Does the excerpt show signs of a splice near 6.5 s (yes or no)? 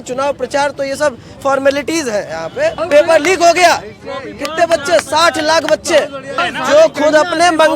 yes